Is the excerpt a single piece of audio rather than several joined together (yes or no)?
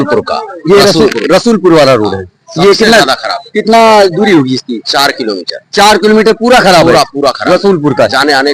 yes